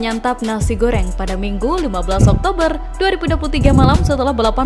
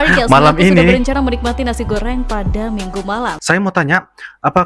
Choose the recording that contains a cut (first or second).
second